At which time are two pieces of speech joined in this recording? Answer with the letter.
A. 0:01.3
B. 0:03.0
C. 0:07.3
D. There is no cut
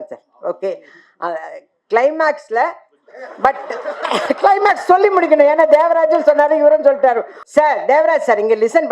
C